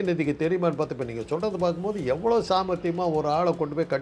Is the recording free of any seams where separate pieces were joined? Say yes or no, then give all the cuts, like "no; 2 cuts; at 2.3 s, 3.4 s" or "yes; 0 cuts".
yes; 0 cuts